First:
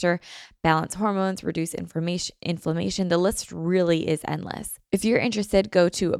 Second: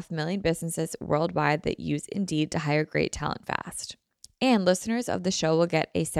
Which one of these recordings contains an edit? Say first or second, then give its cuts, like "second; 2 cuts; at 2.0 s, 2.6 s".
first; 1 cut; at 4.7 s